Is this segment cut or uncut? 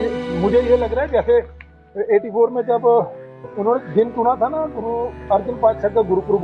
uncut